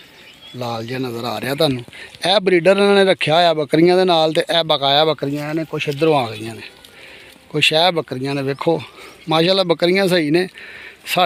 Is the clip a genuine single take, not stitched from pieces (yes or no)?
yes